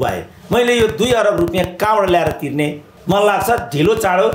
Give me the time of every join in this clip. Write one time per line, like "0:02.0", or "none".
0:02.9